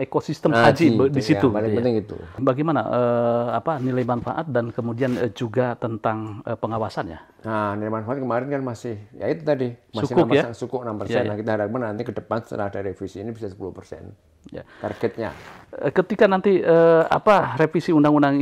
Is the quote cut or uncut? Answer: cut